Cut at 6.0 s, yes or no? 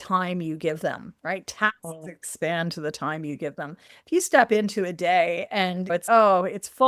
yes